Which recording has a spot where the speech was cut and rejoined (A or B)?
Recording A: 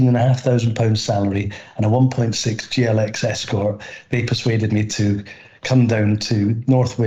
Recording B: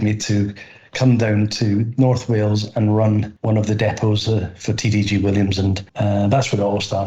B